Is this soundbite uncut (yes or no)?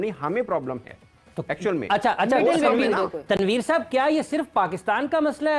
yes